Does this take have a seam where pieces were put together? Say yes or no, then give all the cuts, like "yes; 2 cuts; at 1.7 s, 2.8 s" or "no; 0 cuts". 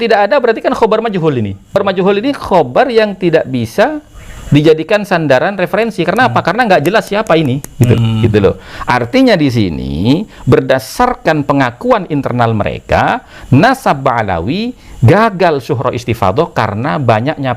yes; 2 cuts; at 1.8 s, 8.0 s